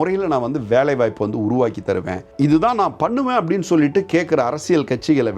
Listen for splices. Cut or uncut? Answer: uncut